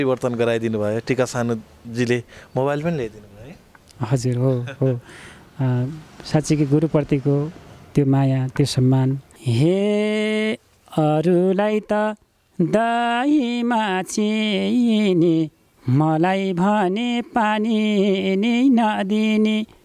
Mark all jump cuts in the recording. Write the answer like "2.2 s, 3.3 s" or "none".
9.3 s